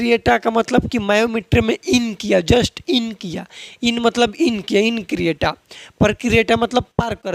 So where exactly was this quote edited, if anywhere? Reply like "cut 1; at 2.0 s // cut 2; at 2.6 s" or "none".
none